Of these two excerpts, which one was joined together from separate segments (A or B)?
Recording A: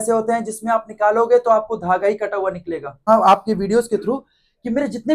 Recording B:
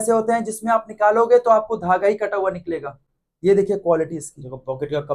A